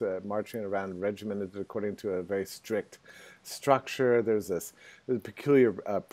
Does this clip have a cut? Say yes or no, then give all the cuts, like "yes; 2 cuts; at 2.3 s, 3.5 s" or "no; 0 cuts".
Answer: no; 0 cuts